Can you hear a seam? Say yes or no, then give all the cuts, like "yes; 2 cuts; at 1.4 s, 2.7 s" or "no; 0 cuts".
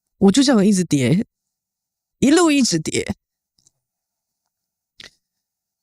no; 0 cuts